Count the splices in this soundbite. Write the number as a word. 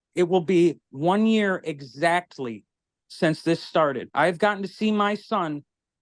one